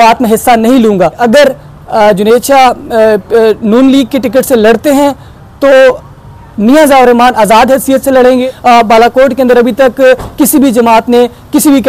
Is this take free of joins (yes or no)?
no